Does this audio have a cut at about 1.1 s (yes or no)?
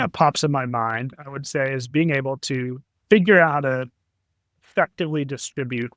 yes